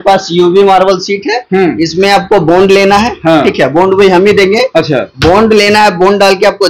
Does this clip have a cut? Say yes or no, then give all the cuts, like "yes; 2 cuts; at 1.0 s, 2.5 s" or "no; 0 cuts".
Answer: no; 0 cuts